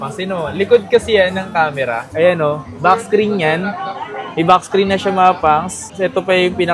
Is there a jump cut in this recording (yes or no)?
no